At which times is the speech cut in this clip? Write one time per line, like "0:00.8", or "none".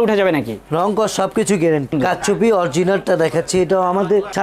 0:01.9